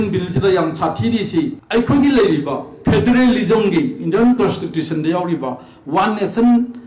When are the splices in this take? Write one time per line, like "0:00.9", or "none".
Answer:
0:01.6

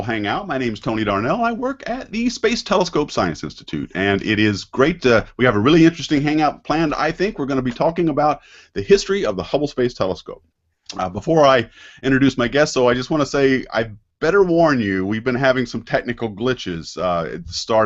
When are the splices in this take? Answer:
none

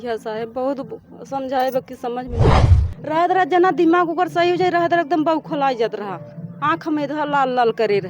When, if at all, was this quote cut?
0:02.5

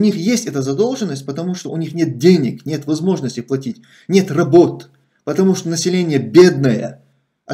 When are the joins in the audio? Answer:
none

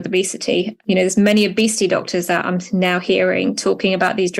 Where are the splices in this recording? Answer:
none

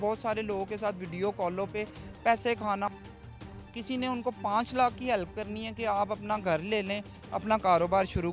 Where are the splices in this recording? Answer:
0:03.3

